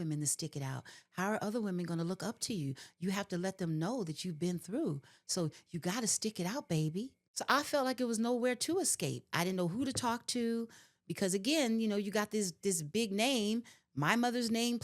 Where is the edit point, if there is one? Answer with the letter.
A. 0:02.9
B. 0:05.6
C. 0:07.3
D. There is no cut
C